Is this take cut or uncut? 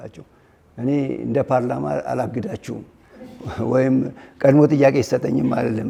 uncut